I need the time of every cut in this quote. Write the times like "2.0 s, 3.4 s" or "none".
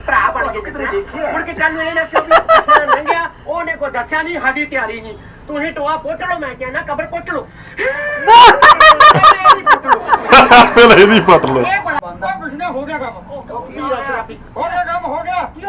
12.0 s